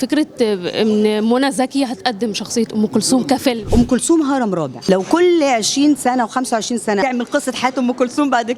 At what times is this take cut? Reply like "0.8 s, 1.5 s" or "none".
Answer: 3.7 s, 4.7 s, 7.0 s